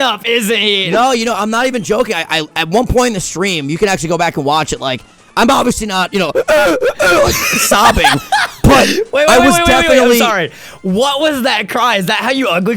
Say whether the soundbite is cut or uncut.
uncut